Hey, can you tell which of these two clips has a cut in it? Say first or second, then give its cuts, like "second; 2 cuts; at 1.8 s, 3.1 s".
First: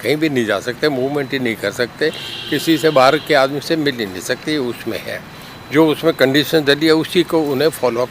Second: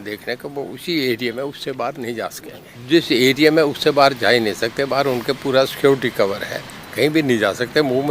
second; 1 cut; at 2.7 s